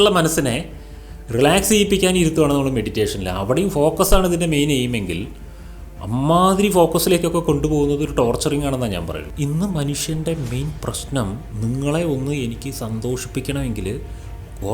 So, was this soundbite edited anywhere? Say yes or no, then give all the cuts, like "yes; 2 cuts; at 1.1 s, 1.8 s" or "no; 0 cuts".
yes; 1 cut; at 9.2 s